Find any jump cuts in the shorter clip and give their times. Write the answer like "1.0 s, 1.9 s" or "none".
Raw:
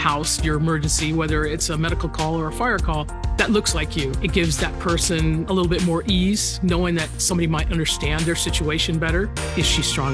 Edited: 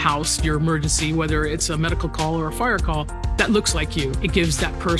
none